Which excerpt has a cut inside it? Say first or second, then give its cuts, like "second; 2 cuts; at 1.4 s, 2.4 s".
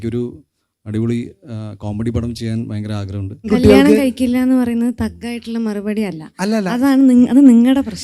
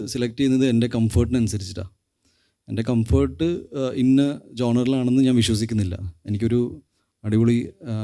first; 1 cut; at 3.5 s